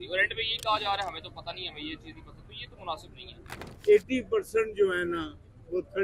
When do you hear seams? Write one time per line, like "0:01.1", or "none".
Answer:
0:03.6